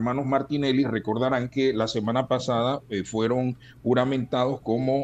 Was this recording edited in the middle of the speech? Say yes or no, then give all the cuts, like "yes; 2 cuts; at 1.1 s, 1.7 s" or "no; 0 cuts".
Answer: no; 0 cuts